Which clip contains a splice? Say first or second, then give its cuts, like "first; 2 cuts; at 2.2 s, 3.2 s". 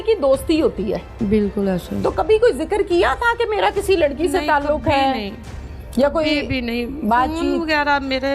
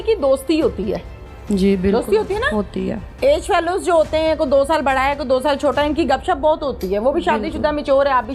first; 1 cut; at 1.2 s